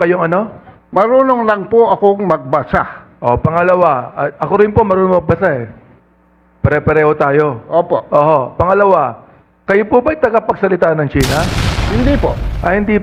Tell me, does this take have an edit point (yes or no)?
no